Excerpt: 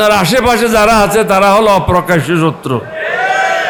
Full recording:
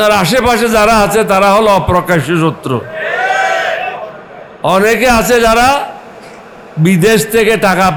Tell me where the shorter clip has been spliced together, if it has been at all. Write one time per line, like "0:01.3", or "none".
none